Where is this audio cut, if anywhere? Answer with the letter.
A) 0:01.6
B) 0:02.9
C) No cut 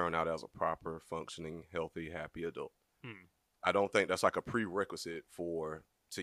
C